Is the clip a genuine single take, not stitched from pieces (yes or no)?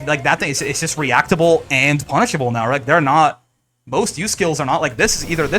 yes